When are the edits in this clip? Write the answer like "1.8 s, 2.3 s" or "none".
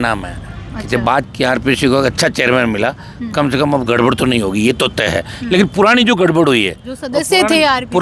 1.0 s